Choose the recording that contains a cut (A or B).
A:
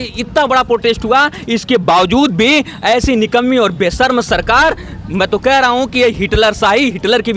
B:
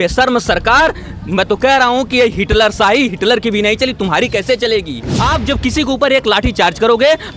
B